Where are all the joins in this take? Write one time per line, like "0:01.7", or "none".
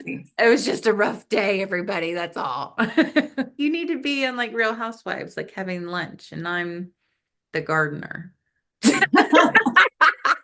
0:03.5